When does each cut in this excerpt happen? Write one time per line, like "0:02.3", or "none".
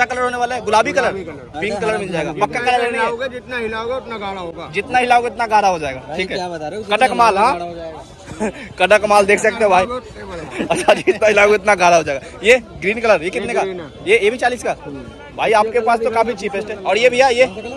none